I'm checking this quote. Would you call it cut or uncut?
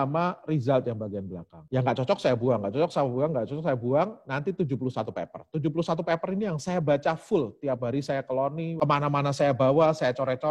cut